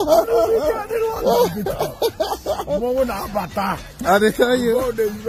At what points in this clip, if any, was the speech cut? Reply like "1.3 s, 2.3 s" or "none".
2.9 s

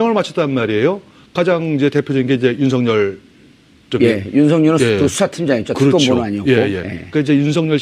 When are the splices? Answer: 3.4 s

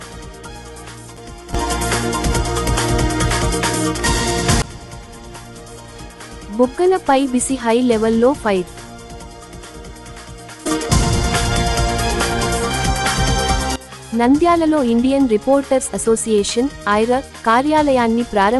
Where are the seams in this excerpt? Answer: 1.1 s

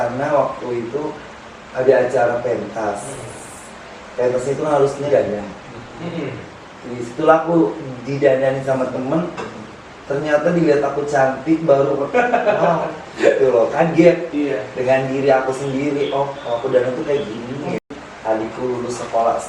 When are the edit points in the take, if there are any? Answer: 18.1 s

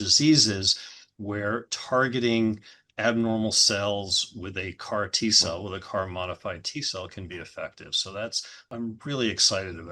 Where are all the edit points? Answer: 8.7 s

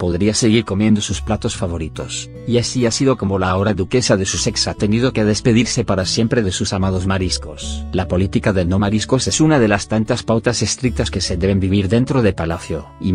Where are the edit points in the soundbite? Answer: none

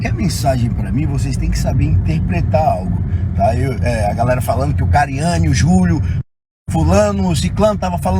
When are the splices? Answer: none

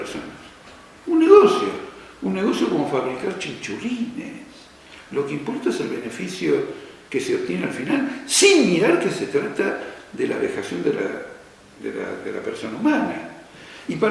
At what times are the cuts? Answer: 1.8 s

